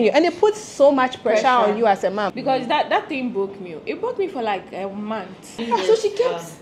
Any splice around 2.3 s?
yes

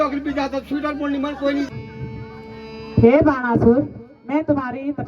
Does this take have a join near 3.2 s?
no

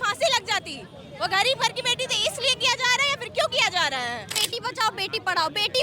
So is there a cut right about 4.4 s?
yes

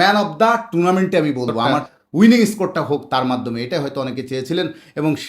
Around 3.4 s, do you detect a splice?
no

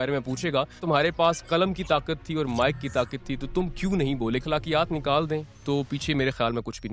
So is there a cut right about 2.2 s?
no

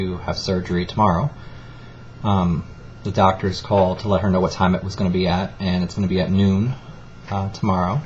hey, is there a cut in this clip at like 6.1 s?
yes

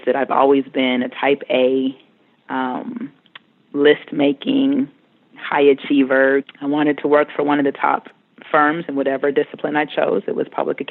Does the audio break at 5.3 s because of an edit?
no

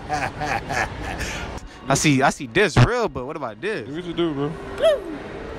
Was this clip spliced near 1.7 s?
yes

